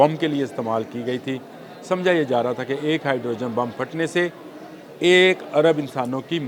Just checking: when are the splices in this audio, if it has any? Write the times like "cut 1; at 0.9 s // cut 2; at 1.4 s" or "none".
none